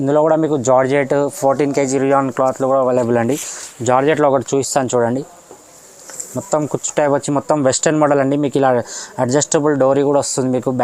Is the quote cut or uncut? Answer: uncut